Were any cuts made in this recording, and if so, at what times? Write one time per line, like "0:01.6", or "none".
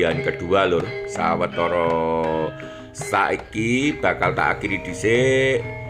none